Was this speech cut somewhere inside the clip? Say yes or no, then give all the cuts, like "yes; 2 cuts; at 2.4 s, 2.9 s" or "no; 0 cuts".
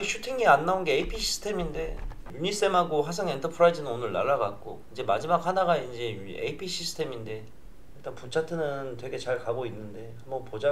yes; 1 cut; at 7.5 s